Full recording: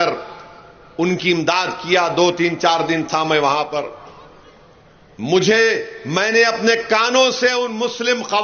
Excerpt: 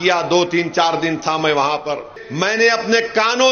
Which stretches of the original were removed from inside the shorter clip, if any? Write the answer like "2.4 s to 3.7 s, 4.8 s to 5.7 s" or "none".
4.1 s to 5.9 s